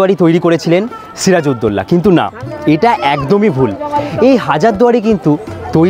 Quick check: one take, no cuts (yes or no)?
yes